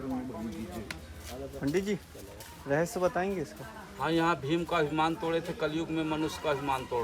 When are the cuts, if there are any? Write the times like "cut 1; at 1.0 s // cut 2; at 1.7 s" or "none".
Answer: none

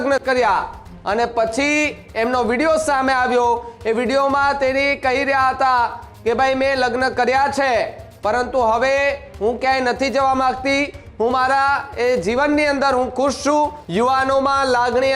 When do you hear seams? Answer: cut 1; at 13.8 s

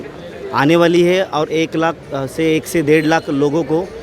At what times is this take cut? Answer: none

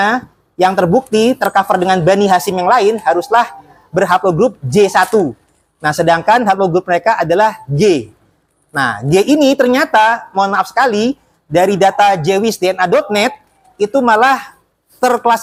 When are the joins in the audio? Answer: none

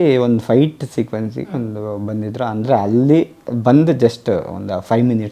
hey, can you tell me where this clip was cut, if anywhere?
none

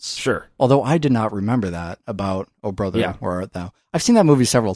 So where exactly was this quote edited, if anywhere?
cut 1; at 2.4 s

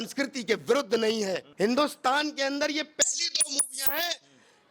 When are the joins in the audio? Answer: cut 1; at 1.5 s

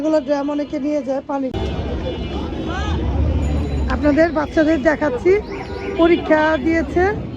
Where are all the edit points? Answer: cut 1; at 1.5 s

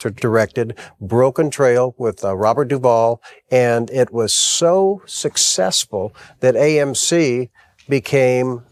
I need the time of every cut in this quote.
none

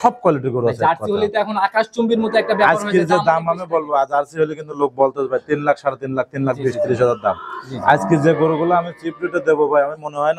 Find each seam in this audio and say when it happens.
none

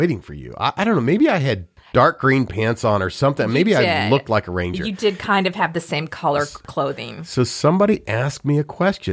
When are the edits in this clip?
none

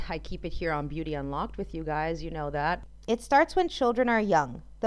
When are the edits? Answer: cut 1; at 2.9 s

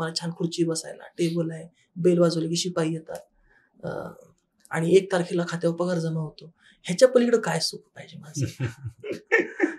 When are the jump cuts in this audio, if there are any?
none

